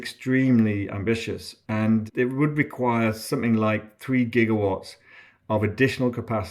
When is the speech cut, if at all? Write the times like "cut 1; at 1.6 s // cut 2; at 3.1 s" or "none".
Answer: cut 1; at 1.7 s